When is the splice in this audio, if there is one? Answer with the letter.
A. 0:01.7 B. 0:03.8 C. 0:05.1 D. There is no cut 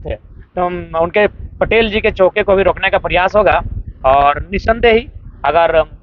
D